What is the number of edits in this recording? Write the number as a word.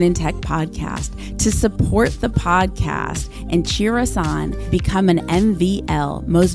zero